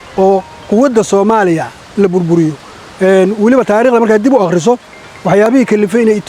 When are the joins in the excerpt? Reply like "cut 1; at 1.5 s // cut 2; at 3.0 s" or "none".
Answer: none